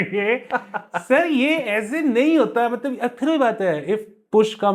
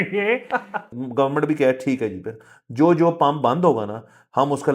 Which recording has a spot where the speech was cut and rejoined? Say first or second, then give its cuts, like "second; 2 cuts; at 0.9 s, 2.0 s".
second; 1 cut; at 0.9 s